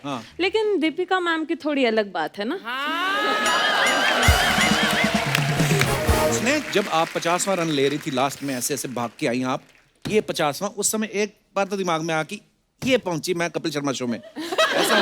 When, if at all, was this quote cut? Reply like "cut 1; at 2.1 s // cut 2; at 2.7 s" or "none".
cut 1; at 6.4 s